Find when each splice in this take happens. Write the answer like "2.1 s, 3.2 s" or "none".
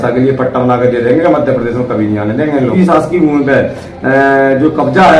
2.7 s